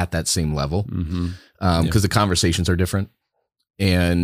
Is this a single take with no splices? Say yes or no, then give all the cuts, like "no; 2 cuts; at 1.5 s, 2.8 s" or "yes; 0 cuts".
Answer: yes; 0 cuts